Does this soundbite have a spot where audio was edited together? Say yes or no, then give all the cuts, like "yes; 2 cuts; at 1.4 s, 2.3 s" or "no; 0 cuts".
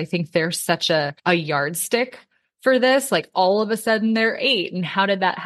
yes; 1 cut; at 1.1 s